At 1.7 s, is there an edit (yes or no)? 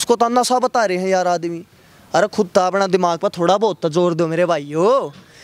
no